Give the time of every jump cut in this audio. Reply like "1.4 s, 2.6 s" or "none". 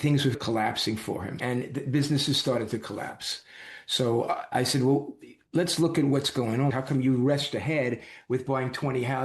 1.4 s, 6.7 s